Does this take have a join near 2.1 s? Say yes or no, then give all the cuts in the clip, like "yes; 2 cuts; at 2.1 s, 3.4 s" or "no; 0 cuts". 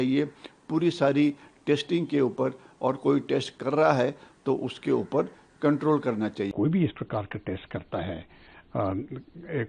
no; 1 cut; at 6.5 s